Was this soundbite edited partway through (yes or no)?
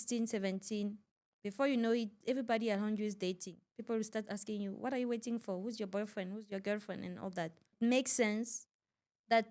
yes